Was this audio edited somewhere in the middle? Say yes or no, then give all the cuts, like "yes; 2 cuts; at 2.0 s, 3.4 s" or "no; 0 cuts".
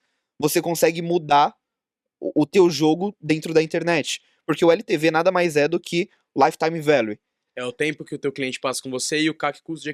no; 0 cuts